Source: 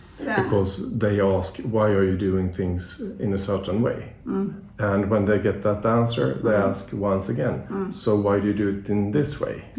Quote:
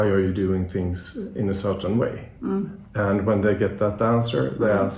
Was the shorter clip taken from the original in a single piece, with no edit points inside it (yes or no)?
yes